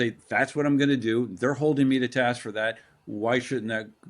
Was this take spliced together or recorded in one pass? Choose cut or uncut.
uncut